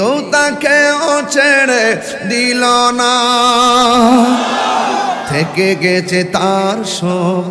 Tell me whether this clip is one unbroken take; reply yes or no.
yes